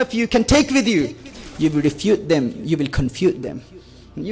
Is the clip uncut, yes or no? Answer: no